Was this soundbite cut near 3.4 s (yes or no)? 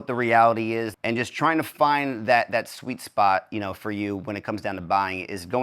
no